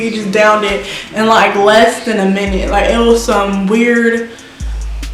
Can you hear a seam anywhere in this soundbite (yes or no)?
no